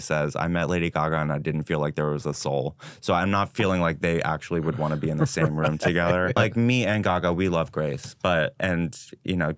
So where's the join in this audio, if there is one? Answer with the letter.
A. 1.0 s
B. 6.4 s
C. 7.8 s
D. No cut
B